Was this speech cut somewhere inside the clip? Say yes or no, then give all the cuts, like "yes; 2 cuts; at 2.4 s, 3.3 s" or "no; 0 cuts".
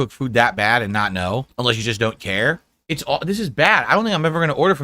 yes; 2 cuts; at 1.5 s, 2.7 s